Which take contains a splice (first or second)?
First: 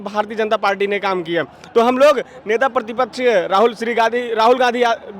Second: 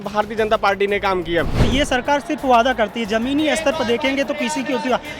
second